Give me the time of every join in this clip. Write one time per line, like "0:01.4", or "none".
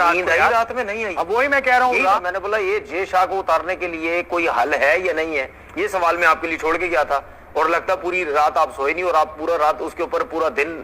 0:02.2